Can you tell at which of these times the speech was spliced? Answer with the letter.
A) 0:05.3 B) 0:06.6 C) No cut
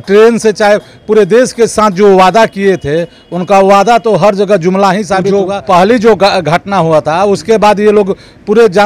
A